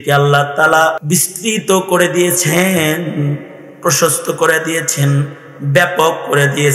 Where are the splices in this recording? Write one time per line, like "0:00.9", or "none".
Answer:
0:01.0